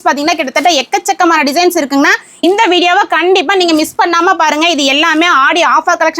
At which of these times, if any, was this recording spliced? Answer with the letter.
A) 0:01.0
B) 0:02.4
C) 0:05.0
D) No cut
B